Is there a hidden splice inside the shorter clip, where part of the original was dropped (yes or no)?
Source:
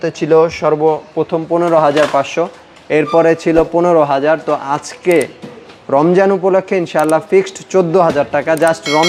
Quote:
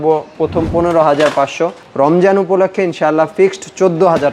yes